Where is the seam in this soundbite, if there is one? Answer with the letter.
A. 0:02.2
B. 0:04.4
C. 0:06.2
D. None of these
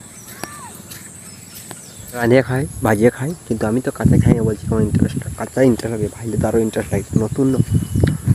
A